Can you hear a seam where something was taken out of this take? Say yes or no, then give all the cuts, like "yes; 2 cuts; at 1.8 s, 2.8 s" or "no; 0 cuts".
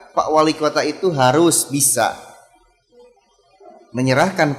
no; 0 cuts